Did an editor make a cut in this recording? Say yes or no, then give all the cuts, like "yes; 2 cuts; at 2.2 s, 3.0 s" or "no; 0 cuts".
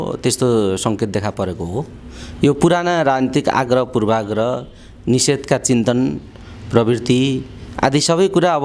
no; 0 cuts